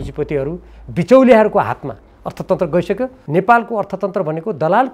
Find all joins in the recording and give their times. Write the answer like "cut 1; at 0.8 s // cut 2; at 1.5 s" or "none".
cut 1; at 3.1 s